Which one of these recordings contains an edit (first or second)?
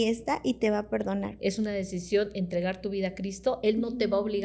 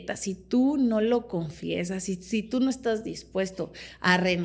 first